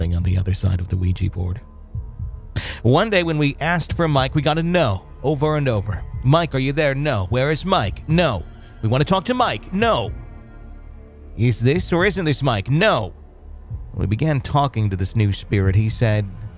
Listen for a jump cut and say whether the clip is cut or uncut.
uncut